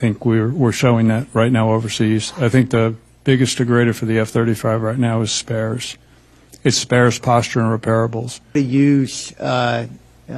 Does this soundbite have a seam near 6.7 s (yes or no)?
no